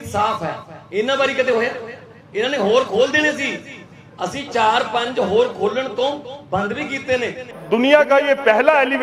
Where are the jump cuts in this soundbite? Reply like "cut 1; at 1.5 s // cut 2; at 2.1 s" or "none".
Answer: cut 1; at 7.5 s